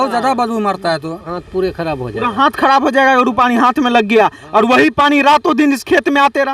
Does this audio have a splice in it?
yes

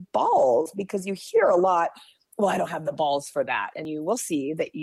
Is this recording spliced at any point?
yes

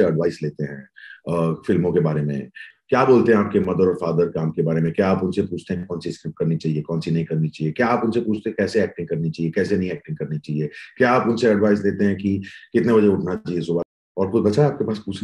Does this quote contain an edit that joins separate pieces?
yes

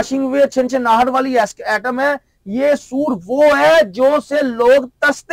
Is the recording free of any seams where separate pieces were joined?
yes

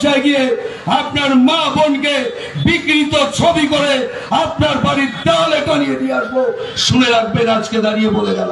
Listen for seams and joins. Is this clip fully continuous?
yes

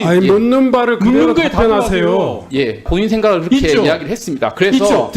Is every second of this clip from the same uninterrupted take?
no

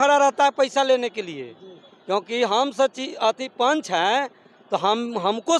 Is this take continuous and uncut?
yes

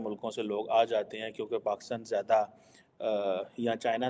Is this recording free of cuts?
yes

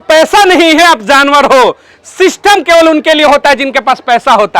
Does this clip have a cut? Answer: no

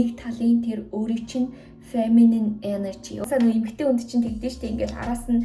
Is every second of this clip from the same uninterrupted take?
no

